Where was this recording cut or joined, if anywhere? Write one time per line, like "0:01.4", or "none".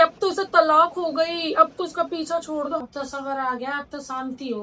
0:02.9